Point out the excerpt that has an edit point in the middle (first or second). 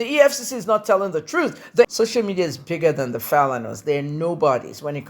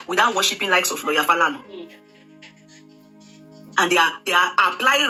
first